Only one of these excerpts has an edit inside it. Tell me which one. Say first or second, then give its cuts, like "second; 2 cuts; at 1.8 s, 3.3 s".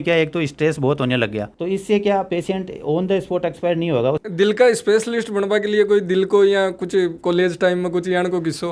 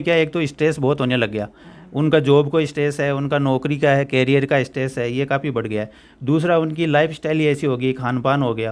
first; 2 cuts; at 1.5 s, 4.2 s